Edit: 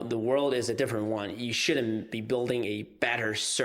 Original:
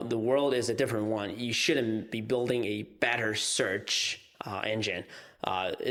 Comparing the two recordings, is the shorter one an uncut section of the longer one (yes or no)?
yes